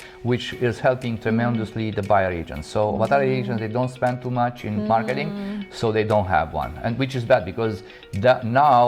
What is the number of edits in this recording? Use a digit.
0